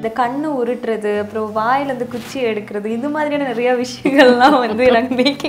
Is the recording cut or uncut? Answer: uncut